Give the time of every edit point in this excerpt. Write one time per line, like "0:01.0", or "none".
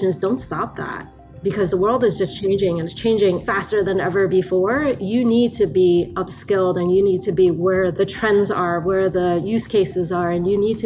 0:02.9
0:08.0